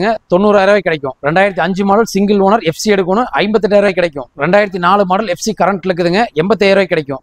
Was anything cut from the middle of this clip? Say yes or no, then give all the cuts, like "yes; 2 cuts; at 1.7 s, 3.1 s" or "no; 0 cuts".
no; 0 cuts